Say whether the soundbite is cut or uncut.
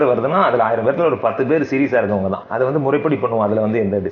cut